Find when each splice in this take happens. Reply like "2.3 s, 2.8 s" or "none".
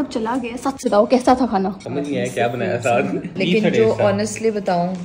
1.8 s, 3.3 s

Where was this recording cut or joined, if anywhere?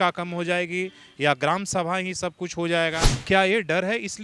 3.1 s

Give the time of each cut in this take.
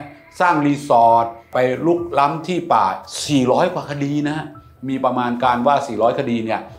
1.5 s, 4.7 s

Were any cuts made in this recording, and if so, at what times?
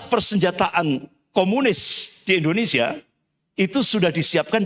none

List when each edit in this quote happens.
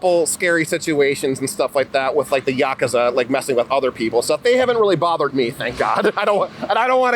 none

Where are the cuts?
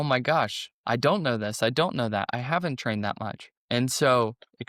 none

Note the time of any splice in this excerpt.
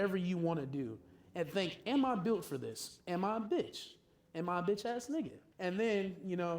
5.4 s

